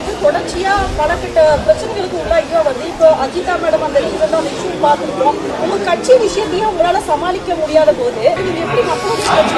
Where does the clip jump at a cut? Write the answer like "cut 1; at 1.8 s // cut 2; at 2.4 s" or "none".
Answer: cut 1; at 8.4 s